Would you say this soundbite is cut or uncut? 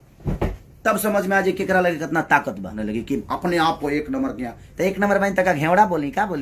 cut